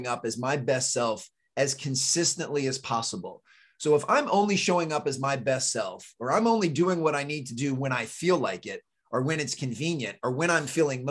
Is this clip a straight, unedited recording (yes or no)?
yes